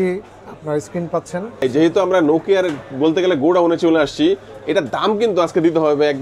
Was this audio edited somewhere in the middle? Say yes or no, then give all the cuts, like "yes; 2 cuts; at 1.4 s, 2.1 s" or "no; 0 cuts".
yes; 1 cut; at 1.6 s